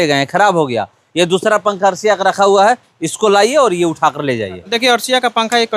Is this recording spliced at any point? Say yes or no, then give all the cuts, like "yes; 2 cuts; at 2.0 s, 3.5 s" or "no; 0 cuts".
yes; 1 cut; at 4.7 s